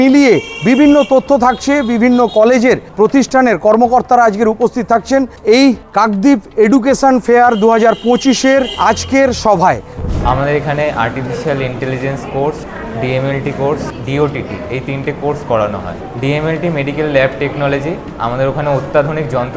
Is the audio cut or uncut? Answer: cut